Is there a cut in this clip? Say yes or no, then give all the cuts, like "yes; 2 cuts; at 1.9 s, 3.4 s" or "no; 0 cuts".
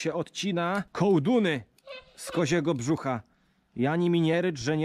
no; 0 cuts